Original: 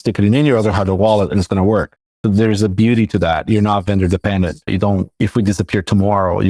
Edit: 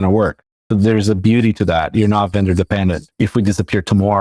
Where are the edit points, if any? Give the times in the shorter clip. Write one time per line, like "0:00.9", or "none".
0:03.1